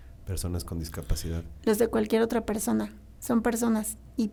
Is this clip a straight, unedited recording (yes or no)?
yes